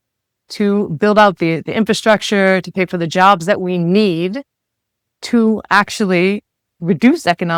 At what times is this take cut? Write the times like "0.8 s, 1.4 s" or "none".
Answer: none